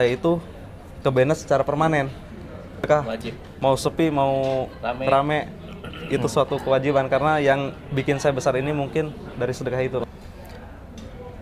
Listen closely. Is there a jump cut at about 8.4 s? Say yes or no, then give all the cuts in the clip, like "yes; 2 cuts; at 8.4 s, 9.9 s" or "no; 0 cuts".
no; 2 cuts; at 2.9 s, 10.0 s